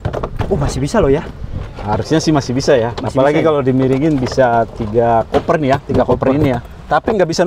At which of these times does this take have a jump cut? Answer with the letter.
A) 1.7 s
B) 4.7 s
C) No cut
C